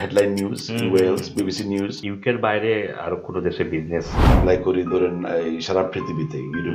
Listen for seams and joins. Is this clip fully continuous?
no; 1 cut; at 1.9 s

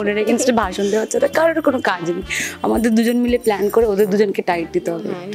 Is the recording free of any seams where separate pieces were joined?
yes; 0 cuts

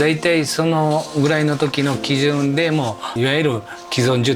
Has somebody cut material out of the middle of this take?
yes; 1 cut; at 3.1 s

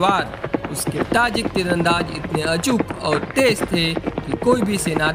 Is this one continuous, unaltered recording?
yes; 0 cuts

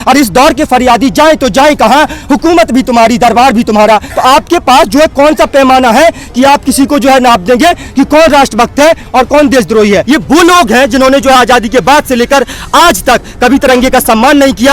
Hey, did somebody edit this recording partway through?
yes; 2 cuts; at 4.1 s, 10.0 s

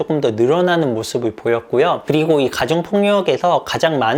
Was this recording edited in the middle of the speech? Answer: no; 0 cuts

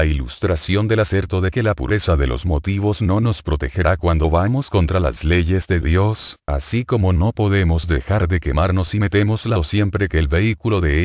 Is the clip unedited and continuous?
yes; 0 cuts

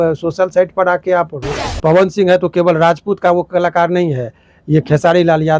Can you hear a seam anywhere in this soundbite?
yes; 1 cut; at 1.4 s

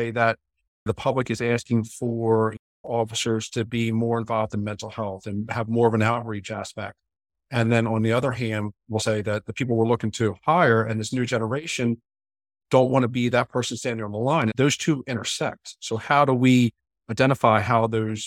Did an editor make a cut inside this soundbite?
yes; 2 cuts; at 9.0 s, 14.5 s

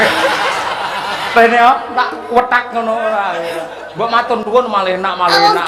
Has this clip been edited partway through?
no; 0 cuts

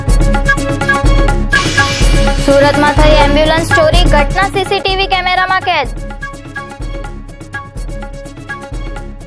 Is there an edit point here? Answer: yes; 1 cut; at 2.1 s

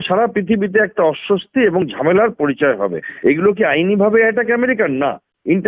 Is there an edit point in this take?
yes; 1 cut; at 3.1 s

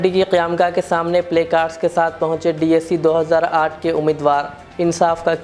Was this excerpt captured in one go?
yes; 0 cuts

